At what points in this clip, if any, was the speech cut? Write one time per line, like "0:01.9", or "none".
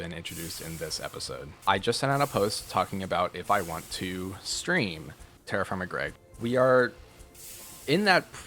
0:01.5
0:06.2